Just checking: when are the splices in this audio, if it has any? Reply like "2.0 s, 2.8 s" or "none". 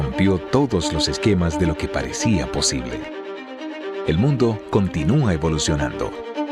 none